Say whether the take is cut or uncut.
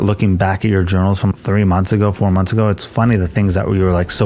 uncut